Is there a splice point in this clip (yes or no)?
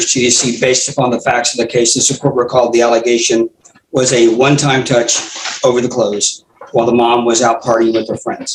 no